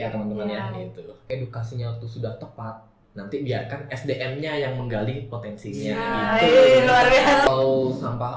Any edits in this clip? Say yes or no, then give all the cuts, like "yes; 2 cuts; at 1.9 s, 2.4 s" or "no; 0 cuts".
yes; 2 cuts; at 1.2 s, 7.5 s